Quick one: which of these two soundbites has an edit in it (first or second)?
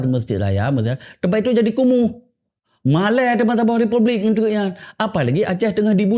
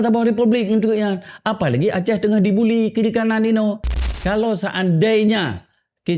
second